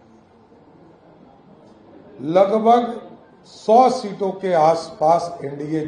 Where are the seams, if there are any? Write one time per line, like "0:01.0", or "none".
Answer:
none